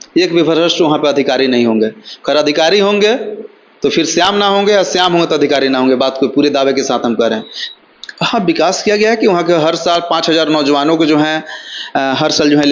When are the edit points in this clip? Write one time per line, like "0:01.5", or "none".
0:07.7